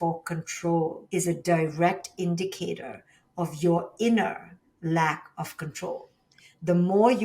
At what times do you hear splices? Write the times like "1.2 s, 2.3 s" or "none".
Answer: 1.0 s